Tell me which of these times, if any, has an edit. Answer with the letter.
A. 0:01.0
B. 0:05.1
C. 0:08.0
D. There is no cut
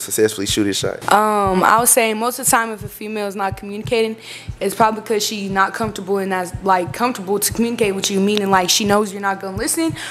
A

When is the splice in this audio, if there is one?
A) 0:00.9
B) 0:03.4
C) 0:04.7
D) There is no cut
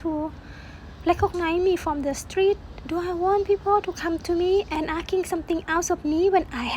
C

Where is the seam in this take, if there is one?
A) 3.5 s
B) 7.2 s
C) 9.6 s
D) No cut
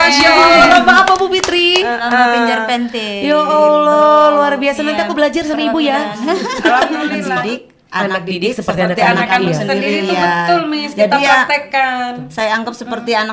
B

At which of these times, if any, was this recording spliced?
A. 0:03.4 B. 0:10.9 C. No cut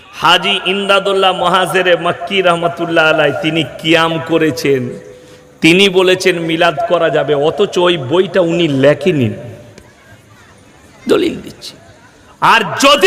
C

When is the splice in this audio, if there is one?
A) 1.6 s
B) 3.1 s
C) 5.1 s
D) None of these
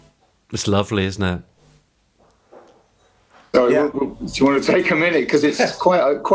A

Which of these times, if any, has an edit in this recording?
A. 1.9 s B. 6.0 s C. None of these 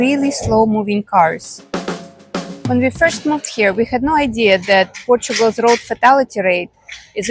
A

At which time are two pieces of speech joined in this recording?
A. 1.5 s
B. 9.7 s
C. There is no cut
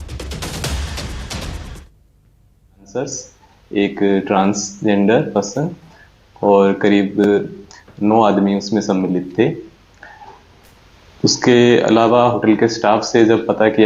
A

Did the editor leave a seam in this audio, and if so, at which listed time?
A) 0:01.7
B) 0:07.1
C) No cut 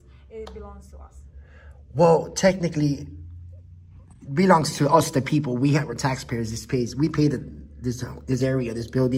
C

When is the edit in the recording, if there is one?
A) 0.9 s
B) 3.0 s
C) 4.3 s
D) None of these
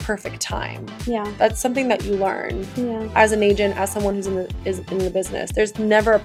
D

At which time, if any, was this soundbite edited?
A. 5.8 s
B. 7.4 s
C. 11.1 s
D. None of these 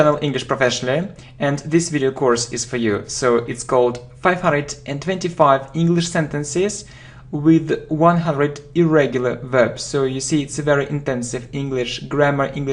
D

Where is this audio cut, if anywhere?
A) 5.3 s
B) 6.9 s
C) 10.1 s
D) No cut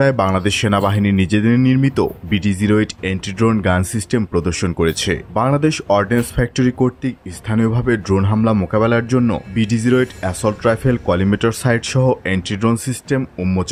D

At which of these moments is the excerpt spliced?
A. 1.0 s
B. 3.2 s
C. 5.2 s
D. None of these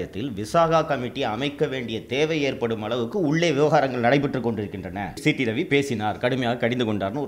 C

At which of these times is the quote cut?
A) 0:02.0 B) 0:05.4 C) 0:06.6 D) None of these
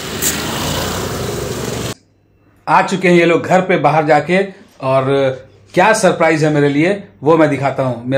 A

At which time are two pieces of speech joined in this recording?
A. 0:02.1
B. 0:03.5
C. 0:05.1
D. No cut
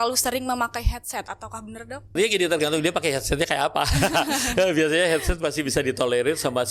A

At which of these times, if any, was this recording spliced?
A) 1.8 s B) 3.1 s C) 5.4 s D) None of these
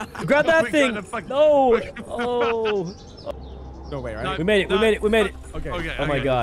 B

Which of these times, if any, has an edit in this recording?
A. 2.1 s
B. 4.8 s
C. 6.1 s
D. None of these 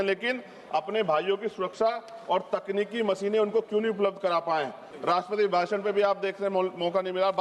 B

